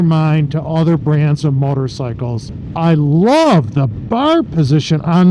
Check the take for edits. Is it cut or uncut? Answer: cut